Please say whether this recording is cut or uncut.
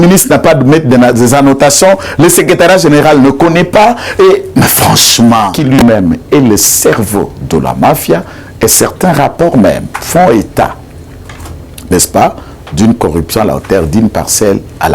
cut